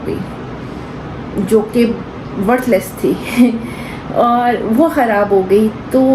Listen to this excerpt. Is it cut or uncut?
uncut